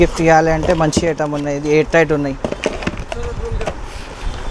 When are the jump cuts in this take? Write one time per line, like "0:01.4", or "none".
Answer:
none